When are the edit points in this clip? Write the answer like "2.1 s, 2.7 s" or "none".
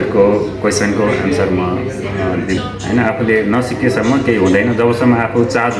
2.6 s

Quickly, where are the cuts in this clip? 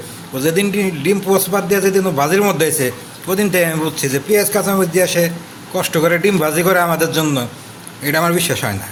none

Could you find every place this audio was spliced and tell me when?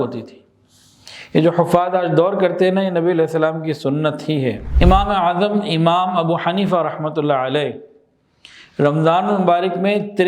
4.7 s

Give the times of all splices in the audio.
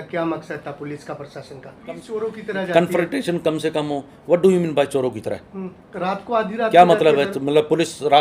2.1 s

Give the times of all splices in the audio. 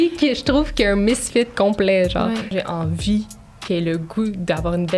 2.5 s

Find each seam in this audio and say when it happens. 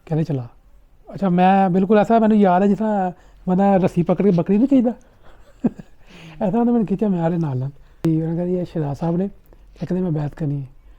8.0 s

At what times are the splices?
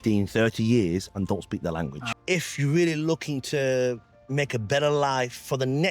2.1 s

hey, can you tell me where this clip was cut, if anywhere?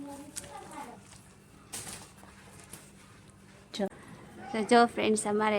3.9 s

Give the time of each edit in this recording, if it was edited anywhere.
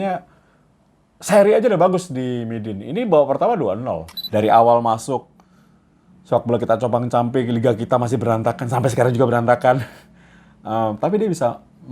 4.1 s

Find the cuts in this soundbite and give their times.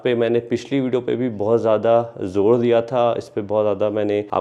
none

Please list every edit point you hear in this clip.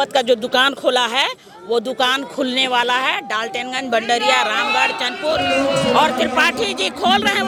none

